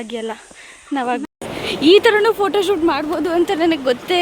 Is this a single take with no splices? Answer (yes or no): no